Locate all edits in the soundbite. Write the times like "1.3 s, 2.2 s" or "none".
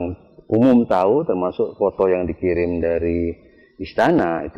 none